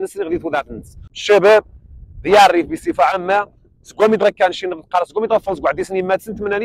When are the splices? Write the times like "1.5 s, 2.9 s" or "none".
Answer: 1.1 s